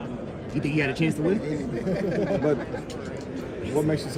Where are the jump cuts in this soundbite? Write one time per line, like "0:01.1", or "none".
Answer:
none